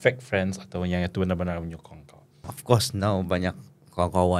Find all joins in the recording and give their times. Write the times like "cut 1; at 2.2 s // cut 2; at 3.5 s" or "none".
cut 1; at 2.5 s